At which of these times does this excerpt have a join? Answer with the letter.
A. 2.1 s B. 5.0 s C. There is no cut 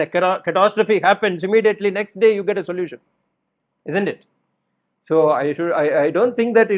C